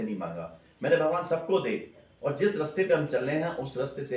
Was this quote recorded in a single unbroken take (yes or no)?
yes